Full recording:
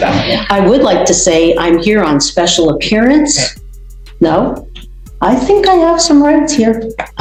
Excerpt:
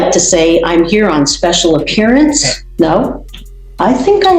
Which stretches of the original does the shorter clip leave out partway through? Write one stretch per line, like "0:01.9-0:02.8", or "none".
0:03.5-0:04.0